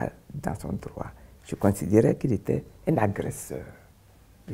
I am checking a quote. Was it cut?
no; 0 cuts

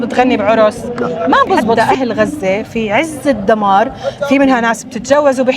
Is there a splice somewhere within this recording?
yes; 1 cut; at 1.7 s

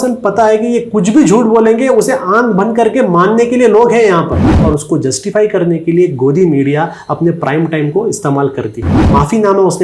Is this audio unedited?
no; 2 cuts; at 4.5 s, 8.9 s

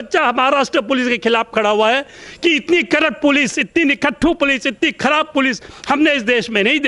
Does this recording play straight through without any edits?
yes; 0 cuts

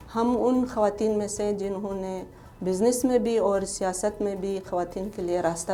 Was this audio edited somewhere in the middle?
no; 0 cuts

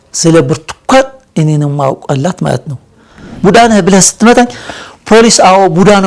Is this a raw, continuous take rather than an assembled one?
no; 1 cut; at 3.3 s

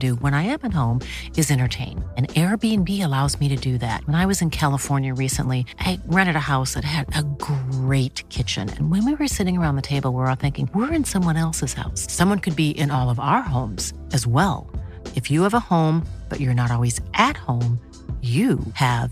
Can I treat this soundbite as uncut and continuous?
yes; 0 cuts

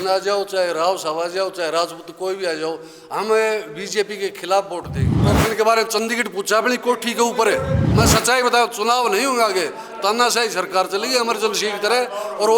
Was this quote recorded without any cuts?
no; 2 cuts; at 5.2 s, 7.8 s

